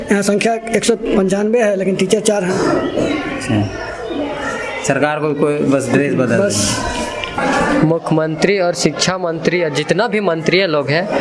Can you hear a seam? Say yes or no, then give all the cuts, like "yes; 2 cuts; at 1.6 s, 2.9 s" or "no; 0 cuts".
yes; 1 cut; at 7.4 s